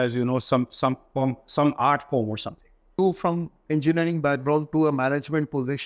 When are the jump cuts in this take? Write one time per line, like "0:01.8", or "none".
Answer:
0:03.0